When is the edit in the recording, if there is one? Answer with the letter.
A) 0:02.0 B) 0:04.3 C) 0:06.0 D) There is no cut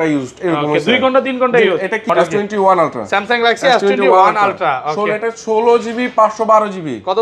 A